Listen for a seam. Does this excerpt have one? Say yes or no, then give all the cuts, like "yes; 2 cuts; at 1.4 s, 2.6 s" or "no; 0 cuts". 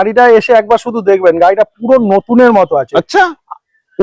no; 0 cuts